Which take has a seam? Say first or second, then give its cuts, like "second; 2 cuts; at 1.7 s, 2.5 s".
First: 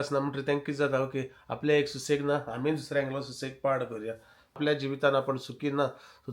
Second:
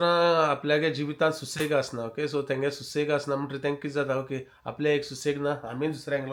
first; 1 cut; at 4.6 s